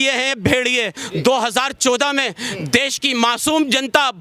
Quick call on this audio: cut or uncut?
cut